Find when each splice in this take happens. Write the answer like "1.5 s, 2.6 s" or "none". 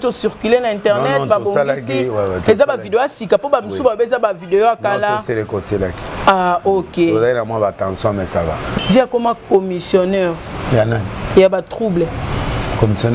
8.7 s